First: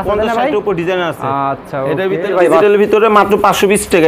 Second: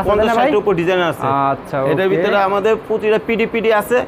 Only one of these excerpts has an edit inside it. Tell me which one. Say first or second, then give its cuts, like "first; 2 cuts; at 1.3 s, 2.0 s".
first; 1 cut; at 2.3 s